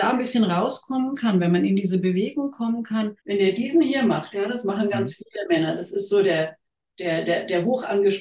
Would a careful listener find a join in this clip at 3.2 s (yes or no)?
yes